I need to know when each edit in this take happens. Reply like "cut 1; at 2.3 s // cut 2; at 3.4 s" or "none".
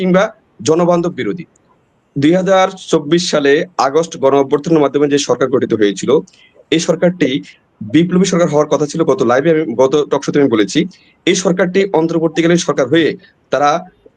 cut 1; at 1.7 s

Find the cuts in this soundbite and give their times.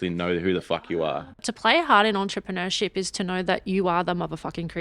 cut 1; at 1.4 s

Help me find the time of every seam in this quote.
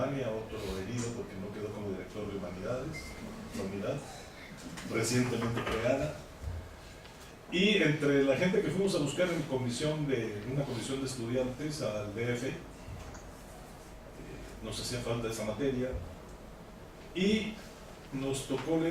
cut 1; at 11.7 s

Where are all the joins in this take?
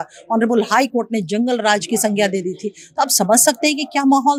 none

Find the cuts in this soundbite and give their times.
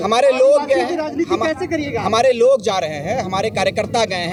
none

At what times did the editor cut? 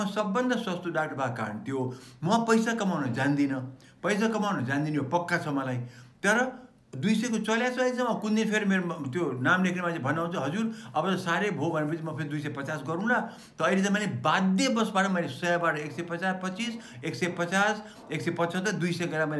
none

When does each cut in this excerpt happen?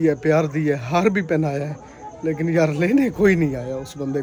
none

